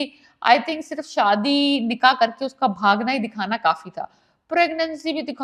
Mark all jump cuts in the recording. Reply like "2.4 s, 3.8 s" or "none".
none